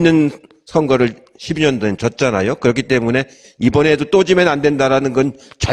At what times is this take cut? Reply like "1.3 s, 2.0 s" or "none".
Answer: none